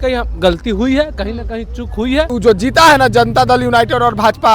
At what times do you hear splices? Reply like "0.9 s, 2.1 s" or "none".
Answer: 2.3 s